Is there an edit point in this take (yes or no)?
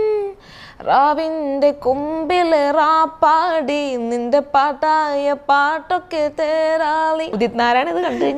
yes